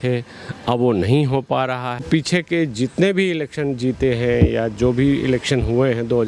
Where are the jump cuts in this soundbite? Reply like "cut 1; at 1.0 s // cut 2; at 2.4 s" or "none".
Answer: cut 1; at 2.0 s